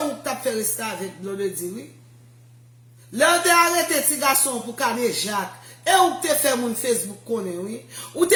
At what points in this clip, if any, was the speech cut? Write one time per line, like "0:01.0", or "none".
none